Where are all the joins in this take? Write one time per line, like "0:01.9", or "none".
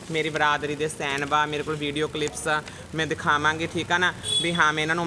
none